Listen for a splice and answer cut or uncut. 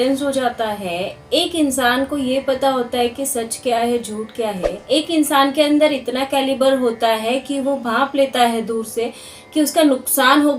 uncut